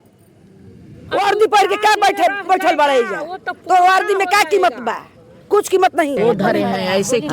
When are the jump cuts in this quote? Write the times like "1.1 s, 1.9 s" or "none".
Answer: 6.2 s